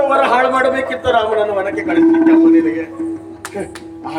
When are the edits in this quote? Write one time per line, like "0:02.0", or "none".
none